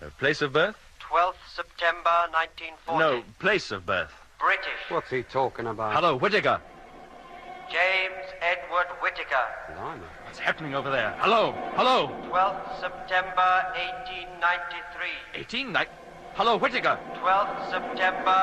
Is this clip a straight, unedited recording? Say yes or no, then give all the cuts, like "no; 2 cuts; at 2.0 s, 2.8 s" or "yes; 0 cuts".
yes; 0 cuts